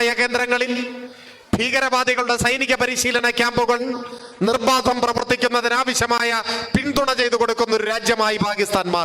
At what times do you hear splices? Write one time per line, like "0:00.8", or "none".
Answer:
none